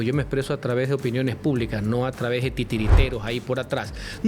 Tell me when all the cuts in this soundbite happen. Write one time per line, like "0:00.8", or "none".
none